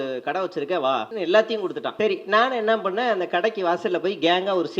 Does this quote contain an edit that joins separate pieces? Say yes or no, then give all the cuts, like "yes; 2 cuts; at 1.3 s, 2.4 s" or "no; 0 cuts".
yes; 2 cuts; at 1.1 s, 1.9 s